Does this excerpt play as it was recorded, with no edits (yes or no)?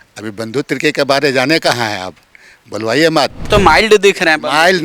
no